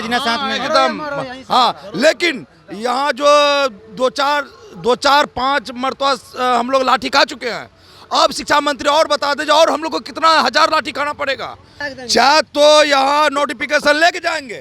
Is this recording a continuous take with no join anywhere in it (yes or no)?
no